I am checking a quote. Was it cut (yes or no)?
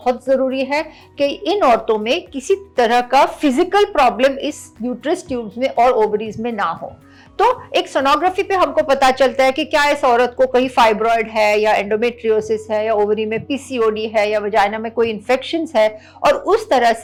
no